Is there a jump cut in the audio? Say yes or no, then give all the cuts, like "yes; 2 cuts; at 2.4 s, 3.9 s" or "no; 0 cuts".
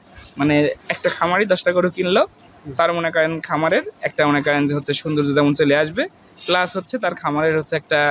no; 0 cuts